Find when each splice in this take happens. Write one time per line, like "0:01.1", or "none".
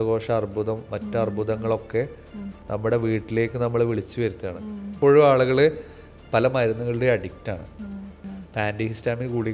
0:05.0
0:08.2